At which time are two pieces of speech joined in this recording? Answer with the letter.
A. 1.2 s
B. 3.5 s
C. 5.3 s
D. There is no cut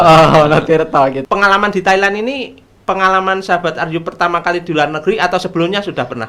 A